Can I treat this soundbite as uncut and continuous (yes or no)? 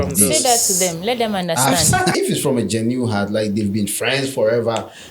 no